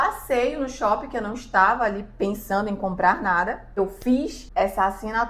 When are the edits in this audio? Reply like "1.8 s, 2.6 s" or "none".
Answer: 3.8 s, 4.4 s